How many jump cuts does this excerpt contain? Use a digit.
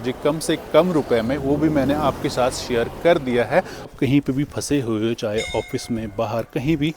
1